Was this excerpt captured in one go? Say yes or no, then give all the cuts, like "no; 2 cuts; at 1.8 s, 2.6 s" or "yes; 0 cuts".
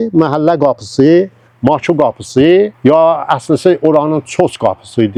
yes; 0 cuts